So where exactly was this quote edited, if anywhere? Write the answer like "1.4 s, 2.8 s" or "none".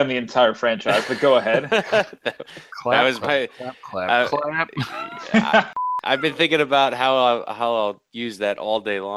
5.7 s